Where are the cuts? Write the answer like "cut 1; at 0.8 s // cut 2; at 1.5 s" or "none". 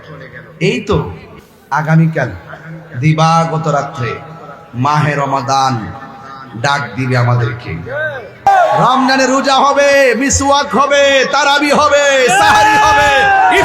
cut 1; at 8.5 s

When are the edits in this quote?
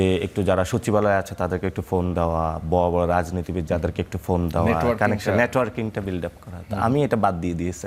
none

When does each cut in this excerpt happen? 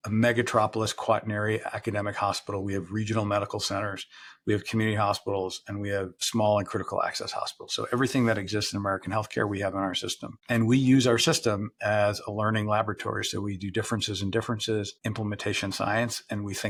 none

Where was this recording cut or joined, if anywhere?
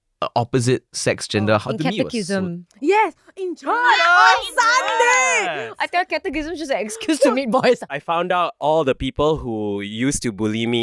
cut 1; at 1.6 s // cut 2; at 5.7 s // cut 3; at 7.9 s

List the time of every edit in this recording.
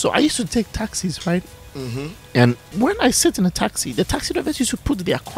cut 1; at 2.7 s

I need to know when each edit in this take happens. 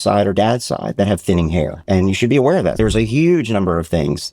cut 1; at 1.8 s // cut 2; at 2.8 s

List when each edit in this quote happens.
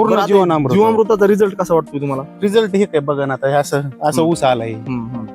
none

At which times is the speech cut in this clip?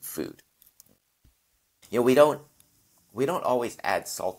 cut 1; at 1.7 s

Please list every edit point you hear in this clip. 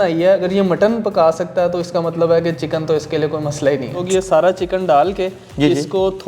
cut 1; at 4.0 s

